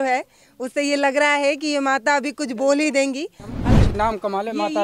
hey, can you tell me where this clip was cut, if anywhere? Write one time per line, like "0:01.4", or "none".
0:03.6

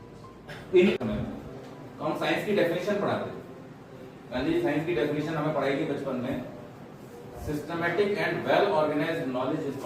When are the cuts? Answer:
0:01.0

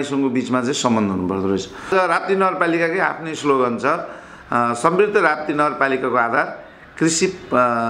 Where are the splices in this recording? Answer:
0:01.9

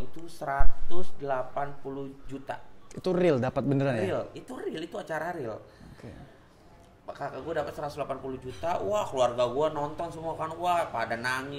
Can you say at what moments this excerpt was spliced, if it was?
none

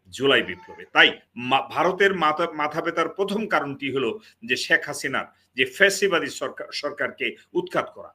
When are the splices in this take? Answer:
0:01.3

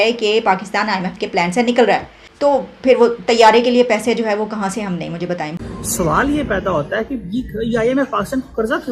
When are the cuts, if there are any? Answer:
0:02.4
0:05.5

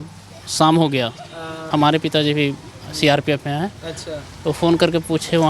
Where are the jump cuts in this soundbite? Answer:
0:01.6

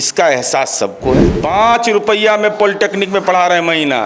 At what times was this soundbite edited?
0:01.3

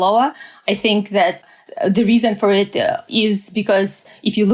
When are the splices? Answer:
0:01.4
0:03.0

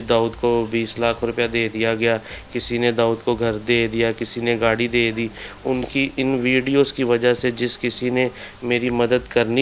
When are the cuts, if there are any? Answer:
none

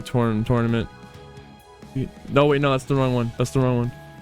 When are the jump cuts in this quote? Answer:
0:03.3

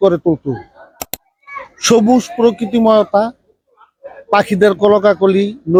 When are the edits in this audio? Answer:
none

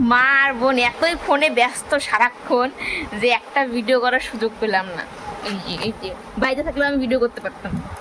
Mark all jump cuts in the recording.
none

